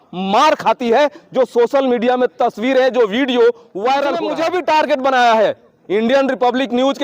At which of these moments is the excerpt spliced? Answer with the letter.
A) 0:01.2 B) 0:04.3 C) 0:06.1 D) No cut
B